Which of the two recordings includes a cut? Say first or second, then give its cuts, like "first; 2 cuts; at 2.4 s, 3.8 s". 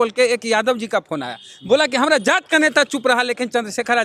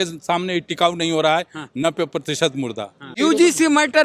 second; 1 cut; at 3.1 s